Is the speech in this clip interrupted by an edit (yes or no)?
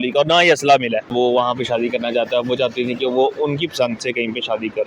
yes